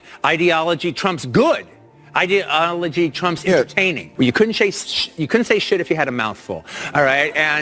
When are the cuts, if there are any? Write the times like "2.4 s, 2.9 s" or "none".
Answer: 4.0 s